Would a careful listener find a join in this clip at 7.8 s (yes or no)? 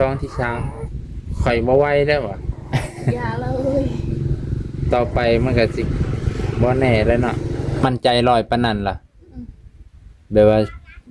yes